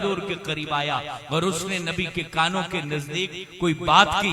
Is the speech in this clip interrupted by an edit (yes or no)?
no